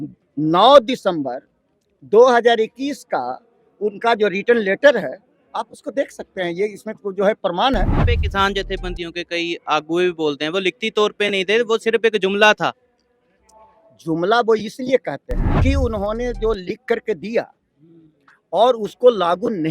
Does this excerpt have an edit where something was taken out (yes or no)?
yes